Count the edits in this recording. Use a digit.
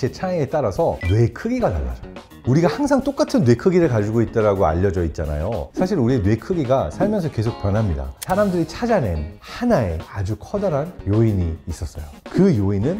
3